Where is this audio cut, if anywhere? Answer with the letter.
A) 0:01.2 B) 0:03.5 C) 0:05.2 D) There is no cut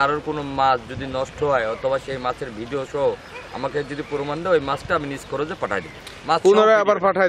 D